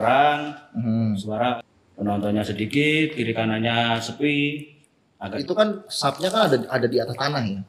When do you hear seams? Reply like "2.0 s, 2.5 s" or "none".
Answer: 1.6 s, 5.3 s